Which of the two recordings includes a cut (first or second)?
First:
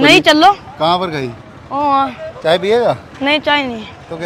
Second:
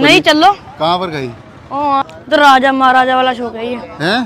second